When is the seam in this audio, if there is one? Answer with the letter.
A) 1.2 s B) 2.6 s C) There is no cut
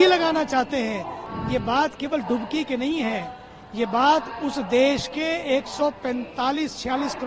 A